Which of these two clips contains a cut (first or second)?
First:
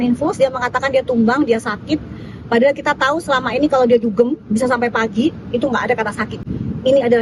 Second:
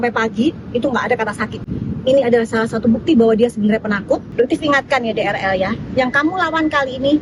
second